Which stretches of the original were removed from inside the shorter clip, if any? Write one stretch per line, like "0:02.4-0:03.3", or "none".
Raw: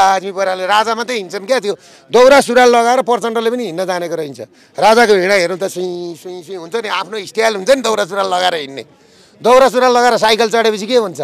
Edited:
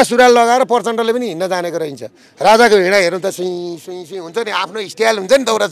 none